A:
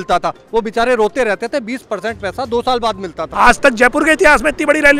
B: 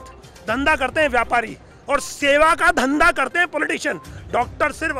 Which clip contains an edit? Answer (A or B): A